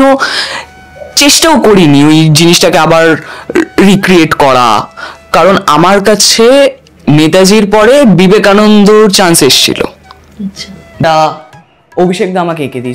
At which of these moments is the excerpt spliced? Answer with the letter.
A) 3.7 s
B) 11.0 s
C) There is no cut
B